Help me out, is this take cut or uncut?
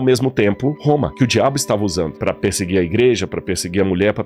uncut